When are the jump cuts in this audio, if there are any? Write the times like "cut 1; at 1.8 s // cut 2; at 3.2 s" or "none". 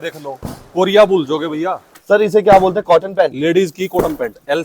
cut 1; at 1.9 s

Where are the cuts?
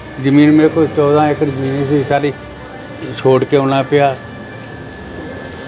none

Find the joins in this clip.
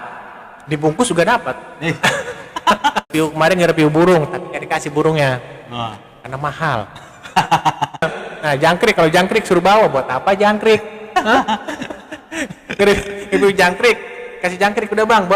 cut 1; at 3.1 s // cut 2; at 8.1 s

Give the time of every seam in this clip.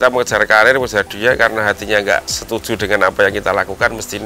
cut 1; at 2.4 s

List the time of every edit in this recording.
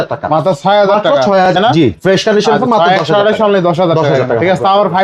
cut 1; at 1.5 s

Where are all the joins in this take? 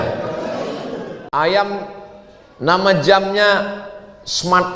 cut 1; at 1.1 s

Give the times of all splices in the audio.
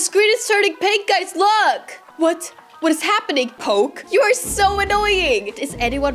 cut 1; at 3.6 s

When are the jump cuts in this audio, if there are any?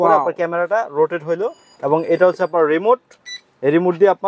none

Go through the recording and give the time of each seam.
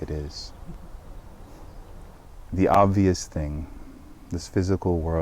cut 1; at 2.3 s

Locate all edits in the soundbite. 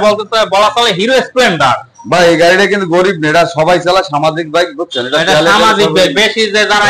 none

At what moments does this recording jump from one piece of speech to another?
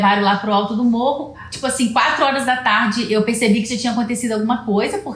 cut 1; at 1.4 s

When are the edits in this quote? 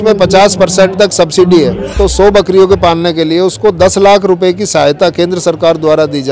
cut 1; at 1.9 s

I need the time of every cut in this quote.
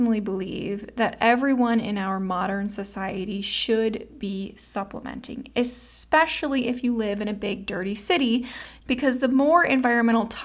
cut 1; at 8.6 s

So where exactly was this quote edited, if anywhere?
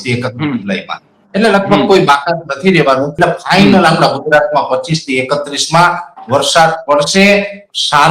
cut 1; at 3.1 s

